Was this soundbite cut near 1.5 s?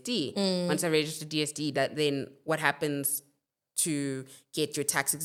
no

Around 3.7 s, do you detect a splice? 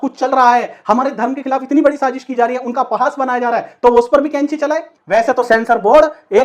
no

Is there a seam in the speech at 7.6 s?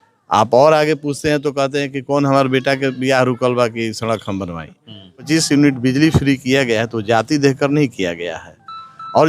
no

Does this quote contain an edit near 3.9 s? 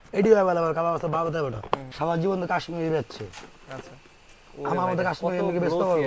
no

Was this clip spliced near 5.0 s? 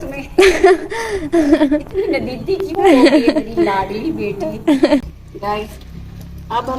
yes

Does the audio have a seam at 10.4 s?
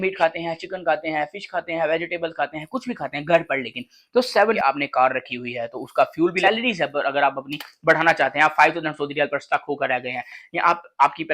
yes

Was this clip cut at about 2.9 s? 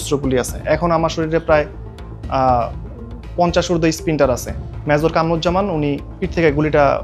no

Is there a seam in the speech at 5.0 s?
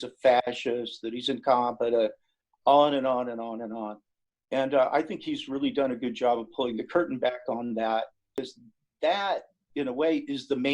no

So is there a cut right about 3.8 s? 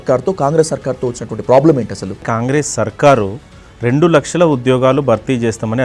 no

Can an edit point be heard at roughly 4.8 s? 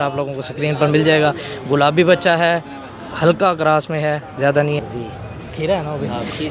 yes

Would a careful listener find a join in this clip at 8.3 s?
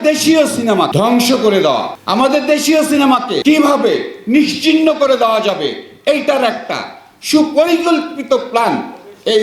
no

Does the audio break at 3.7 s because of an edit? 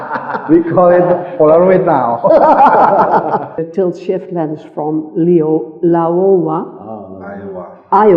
yes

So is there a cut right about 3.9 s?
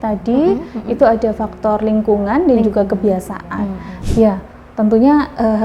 yes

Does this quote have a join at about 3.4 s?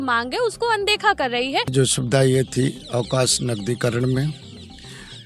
no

